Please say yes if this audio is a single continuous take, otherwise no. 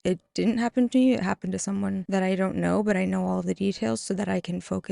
no